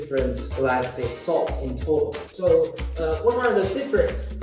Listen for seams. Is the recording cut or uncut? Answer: cut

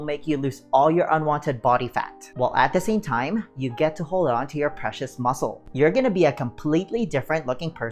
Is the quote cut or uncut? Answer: uncut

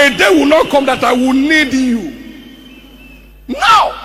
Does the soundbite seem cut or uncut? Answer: uncut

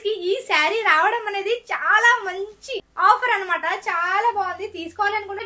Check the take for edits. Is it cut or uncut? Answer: uncut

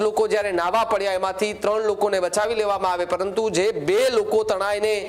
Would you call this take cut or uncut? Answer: uncut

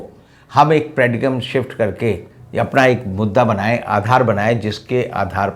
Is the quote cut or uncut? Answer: uncut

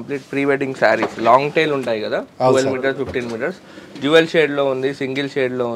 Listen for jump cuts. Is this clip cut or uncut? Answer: uncut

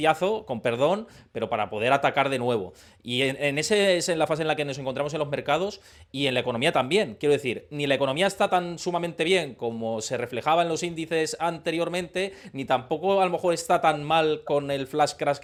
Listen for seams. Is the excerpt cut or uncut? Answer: uncut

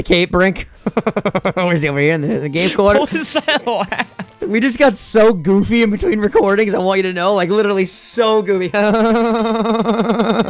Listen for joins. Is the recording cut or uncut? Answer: uncut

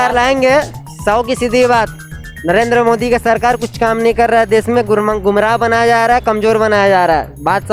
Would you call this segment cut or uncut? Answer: uncut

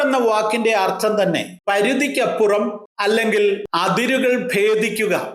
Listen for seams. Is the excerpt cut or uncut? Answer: cut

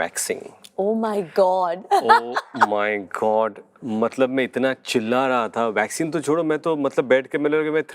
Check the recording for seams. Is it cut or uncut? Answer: uncut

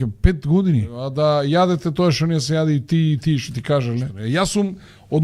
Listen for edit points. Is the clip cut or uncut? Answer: cut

